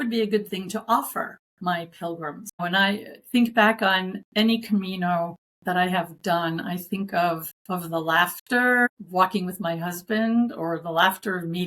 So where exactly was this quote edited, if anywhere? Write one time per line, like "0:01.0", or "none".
0:01.4
0:02.6
0:04.2
0:05.5
0:07.5
0:08.9

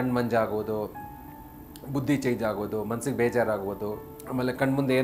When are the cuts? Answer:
0:04.1

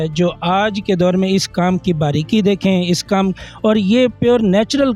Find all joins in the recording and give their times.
none

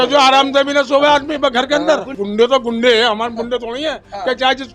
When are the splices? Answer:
0:02.1

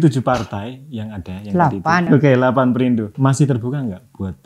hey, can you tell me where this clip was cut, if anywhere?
0:02.1
0:03.1

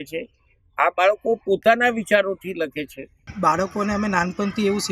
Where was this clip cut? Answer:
0:03.2

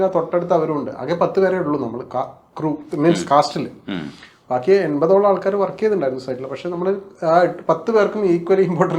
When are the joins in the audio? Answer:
none

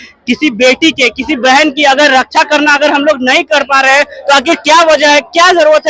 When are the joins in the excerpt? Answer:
none

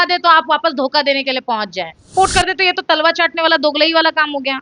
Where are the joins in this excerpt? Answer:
0:02.1

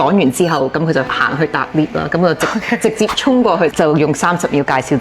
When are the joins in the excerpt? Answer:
0:01.2

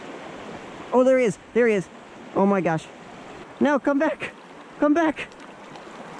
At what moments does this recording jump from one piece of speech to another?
0:03.4

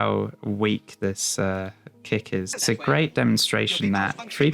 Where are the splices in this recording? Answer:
0:02.5

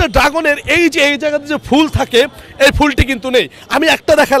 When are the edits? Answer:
none

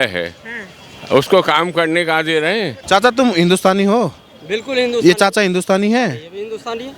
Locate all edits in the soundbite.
0:02.8

